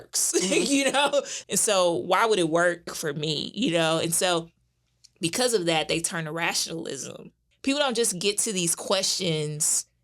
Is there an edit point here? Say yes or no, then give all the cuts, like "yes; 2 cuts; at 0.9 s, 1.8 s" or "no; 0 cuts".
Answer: yes; 3 cuts; at 1.4 s, 3.0 s, 7.5 s